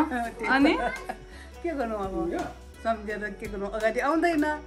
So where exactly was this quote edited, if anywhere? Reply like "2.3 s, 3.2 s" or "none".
none

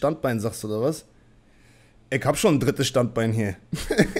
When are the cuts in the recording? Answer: none

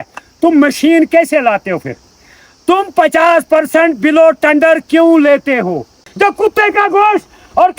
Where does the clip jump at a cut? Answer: 6.0 s

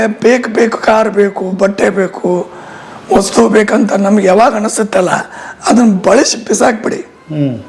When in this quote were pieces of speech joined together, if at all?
none

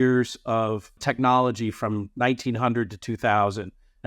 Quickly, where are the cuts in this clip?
1.0 s

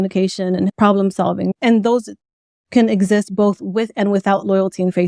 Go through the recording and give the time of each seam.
0.7 s, 1.5 s

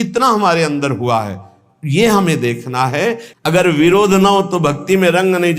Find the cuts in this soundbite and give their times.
3.3 s

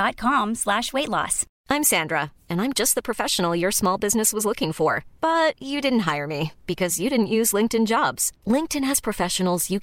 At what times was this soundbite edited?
1.5 s

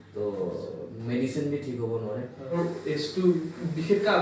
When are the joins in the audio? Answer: 2.6 s

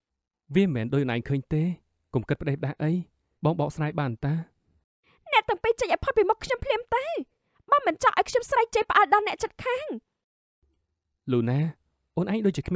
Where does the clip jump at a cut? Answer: none

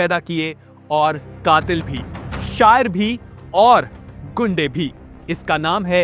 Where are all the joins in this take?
5.1 s

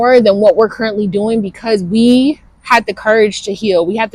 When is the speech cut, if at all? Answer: none

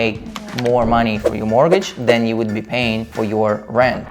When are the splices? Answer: 3.1 s

